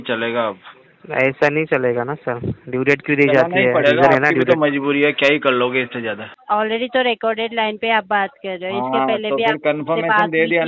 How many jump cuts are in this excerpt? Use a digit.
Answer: 1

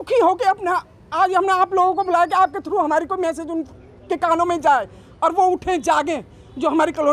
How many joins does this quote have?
0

